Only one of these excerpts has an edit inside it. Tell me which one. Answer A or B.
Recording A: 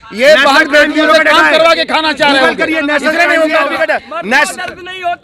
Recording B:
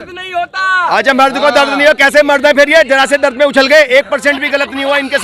A